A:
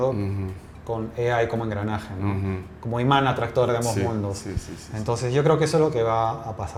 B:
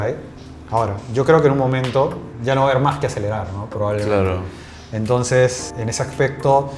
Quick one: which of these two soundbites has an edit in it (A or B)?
B